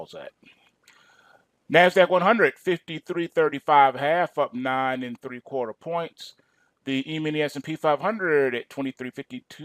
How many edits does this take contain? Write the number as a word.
one